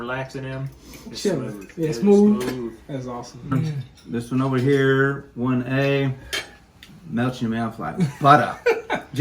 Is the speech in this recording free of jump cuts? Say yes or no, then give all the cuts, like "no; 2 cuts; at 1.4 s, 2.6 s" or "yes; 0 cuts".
no; 1 cut; at 3.5 s